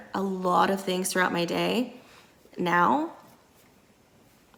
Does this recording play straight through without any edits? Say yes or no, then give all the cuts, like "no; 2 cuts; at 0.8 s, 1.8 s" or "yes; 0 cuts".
yes; 0 cuts